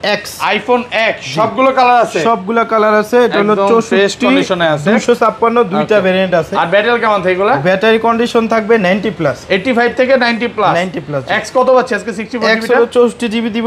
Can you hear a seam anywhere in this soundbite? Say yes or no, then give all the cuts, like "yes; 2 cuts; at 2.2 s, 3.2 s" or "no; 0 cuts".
no; 0 cuts